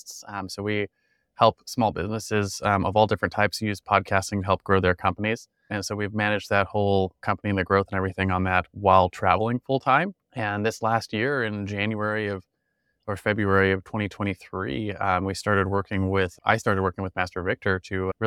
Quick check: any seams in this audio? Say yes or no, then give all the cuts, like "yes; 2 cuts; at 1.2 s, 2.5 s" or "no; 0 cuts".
yes; 3 cuts; at 5.8 s, 7.2 s, 10.2 s